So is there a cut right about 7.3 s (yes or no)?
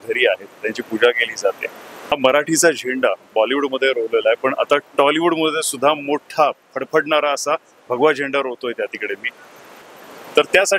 no